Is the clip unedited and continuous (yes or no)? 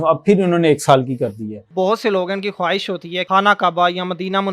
no